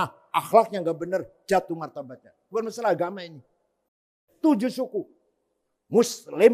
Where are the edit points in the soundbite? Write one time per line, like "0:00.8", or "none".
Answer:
0:04.0